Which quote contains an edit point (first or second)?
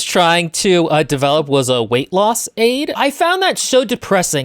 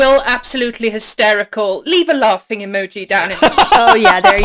first